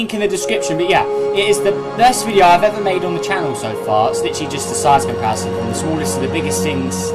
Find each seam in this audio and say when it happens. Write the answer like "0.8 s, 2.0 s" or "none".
1.3 s